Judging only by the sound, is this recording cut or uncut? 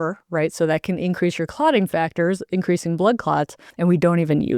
cut